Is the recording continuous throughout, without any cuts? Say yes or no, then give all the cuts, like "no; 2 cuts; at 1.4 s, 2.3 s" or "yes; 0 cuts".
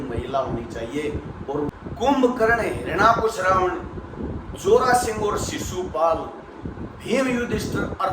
no; 1 cut; at 1.7 s